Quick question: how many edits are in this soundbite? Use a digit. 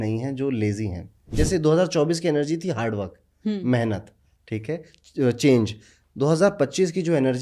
1